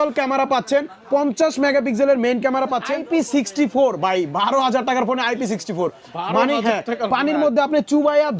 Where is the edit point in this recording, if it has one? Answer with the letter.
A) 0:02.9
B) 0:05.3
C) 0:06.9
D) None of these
A